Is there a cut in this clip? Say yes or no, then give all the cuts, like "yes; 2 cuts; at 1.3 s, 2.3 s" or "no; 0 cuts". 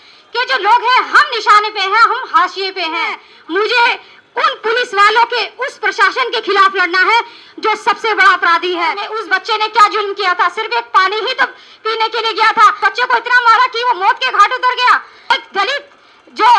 yes; 4 cuts; at 3.3 s, 9.1 s, 12.8 s, 15.3 s